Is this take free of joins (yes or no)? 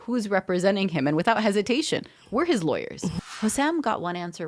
no